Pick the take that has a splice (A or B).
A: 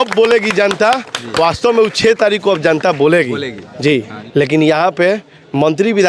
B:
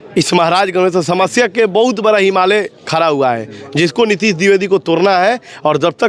A